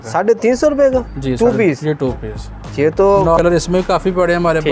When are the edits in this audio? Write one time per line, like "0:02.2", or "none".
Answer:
0:03.4